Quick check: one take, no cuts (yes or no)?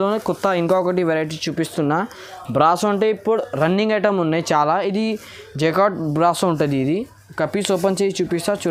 yes